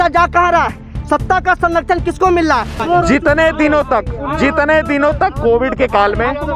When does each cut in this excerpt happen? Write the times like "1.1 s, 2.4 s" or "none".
2.8 s

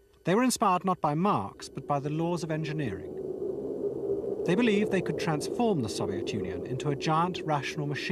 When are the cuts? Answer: 5.7 s

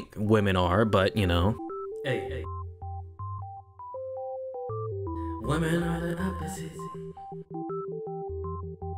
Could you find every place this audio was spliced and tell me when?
1.6 s

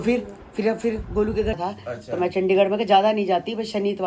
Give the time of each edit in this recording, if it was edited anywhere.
1.6 s

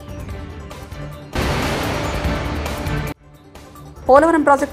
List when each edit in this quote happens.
none

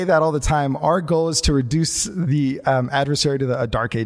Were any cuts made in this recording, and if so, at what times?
none

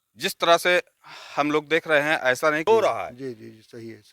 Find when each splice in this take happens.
2.6 s

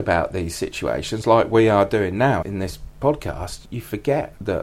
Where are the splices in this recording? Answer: none

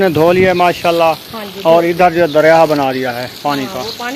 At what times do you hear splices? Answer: none

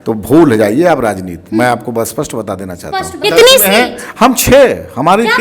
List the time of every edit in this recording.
3.2 s

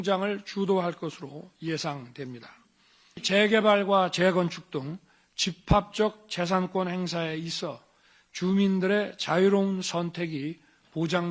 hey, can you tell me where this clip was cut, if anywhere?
3.2 s

